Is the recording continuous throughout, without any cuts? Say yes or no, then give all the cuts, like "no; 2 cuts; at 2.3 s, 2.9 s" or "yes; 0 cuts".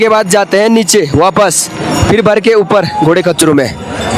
yes; 0 cuts